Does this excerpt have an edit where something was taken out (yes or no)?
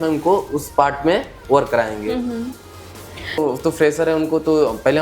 yes